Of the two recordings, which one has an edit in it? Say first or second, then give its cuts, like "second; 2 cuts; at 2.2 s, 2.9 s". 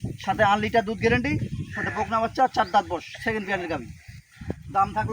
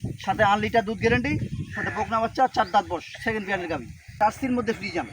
second; 1 cut; at 4.1 s